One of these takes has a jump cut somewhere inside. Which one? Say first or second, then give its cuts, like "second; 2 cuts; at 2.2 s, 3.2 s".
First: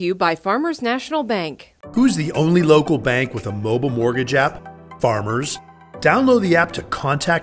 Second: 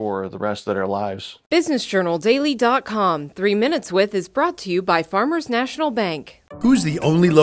second; 1 cut; at 1.3 s